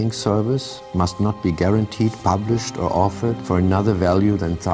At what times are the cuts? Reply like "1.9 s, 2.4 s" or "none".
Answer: none